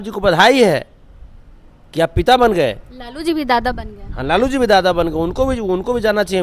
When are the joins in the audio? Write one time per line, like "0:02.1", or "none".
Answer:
none